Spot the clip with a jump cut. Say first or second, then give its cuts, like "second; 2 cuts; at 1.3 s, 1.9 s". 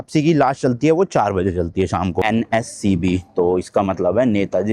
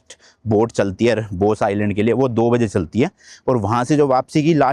first; 1 cut; at 2.2 s